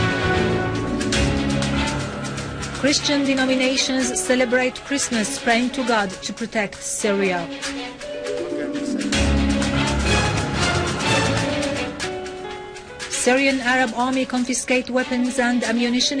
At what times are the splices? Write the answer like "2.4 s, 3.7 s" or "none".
12.8 s